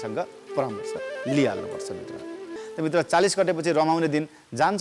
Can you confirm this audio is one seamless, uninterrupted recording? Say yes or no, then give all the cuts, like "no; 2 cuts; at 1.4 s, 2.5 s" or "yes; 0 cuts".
no; 1 cut; at 2.6 s